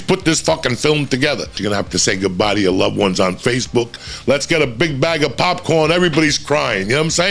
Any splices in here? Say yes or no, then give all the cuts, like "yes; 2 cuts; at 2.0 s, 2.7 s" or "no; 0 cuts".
yes; 2 cuts; at 1.5 s, 4.1 s